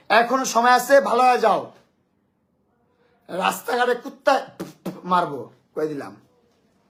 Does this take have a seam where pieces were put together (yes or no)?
no